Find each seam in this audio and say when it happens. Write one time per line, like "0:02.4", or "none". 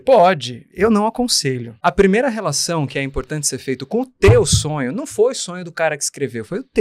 0:01.7